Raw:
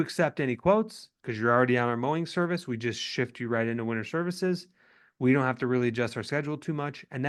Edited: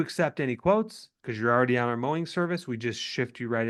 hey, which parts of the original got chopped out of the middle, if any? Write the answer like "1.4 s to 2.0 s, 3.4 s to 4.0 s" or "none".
none